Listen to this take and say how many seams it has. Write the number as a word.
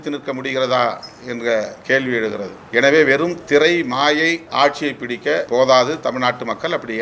three